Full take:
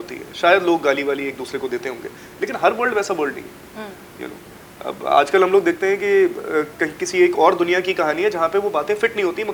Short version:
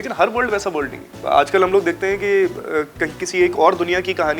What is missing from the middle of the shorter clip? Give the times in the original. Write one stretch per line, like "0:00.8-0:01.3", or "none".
0:03.5-0:04.9